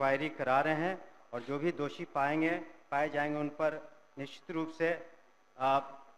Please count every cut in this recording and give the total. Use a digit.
0